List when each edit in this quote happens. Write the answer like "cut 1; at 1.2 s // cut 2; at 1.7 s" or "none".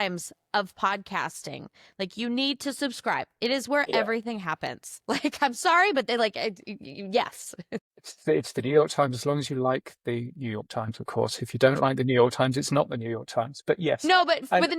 none